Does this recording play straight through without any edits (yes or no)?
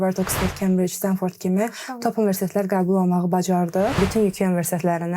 no